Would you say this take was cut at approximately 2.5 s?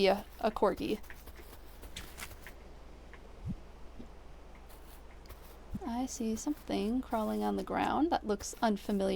no; 1 cut; at 5.8 s

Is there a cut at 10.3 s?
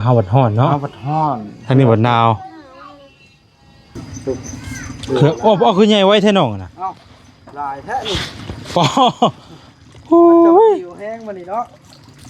no; 1 cut; at 4.0 s

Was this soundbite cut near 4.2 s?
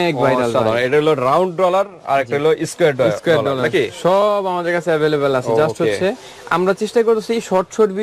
no; 0 cuts

